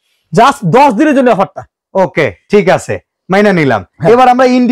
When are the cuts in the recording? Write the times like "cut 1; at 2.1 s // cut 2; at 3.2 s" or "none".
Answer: none